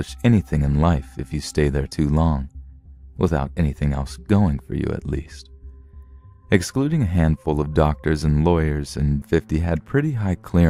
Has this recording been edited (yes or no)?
no